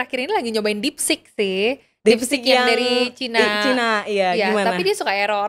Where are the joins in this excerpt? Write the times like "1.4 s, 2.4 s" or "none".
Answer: none